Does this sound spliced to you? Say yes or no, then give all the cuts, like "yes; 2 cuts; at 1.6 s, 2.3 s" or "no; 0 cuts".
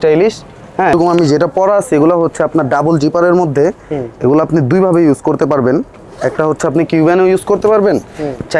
yes; 1 cut; at 0.9 s